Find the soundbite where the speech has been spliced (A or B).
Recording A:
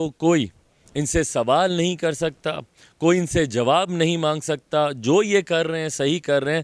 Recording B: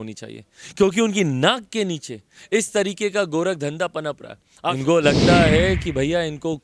B